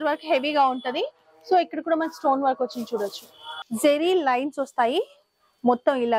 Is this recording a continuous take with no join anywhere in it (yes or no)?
no